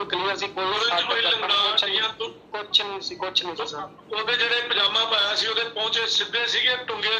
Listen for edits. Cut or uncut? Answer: uncut